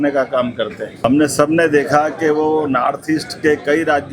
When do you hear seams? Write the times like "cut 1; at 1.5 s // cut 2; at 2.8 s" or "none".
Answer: cut 1; at 1.0 s